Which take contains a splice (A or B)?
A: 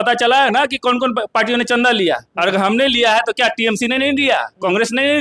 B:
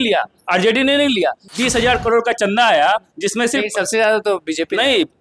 B